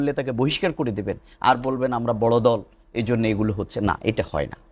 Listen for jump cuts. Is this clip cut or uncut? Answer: uncut